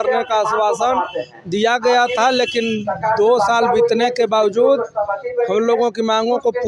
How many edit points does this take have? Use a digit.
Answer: 0